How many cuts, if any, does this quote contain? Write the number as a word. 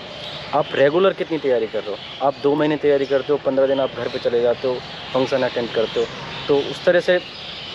zero